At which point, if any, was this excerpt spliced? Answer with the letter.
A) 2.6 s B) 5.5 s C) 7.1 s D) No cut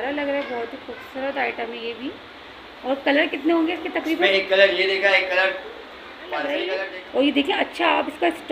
D